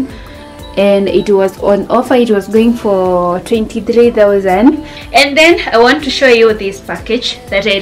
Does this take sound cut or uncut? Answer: cut